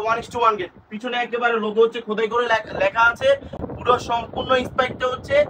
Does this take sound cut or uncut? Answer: uncut